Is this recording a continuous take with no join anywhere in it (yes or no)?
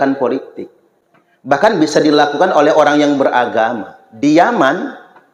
yes